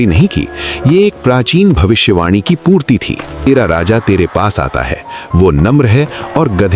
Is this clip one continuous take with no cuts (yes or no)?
no